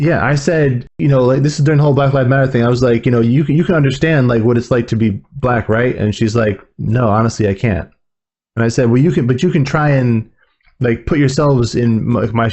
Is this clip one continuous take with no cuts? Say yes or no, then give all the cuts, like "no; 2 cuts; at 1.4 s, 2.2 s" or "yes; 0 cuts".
no; 1 cut; at 0.9 s